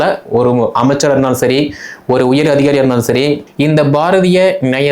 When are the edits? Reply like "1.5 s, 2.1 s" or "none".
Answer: 3.4 s